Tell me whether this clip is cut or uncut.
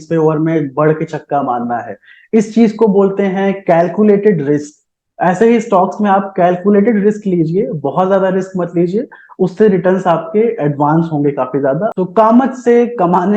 cut